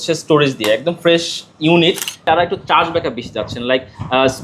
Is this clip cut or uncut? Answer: cut